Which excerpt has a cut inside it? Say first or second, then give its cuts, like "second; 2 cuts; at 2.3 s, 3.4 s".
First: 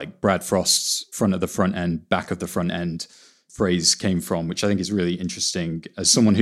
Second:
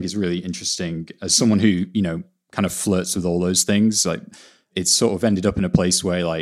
first; 1 cut; at 1.1 s